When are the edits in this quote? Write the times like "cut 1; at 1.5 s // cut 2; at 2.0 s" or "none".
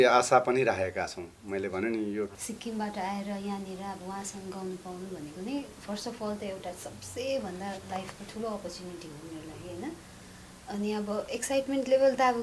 cut 1; at 2.4 s